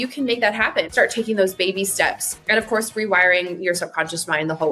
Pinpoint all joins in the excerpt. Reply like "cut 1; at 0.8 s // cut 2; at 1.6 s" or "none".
cut 1; at 0.9 s // cut 2; at 2.3 s